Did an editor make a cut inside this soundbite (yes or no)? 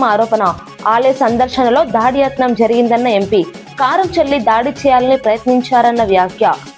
no